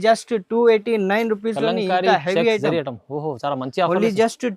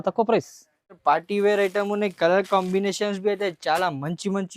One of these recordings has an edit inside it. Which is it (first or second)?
second